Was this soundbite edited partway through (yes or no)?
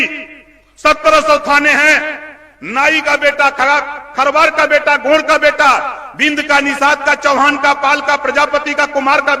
no